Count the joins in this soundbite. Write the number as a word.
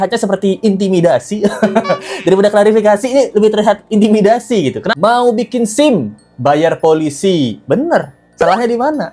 one